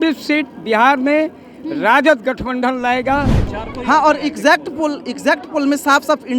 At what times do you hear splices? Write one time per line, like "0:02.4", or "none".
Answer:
0:03.5